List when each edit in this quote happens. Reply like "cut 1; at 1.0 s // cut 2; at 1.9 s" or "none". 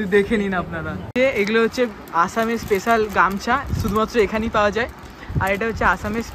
cut 1; at 0.9 s